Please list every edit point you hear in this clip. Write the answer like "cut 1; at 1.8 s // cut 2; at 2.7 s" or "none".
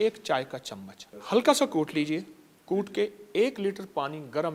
none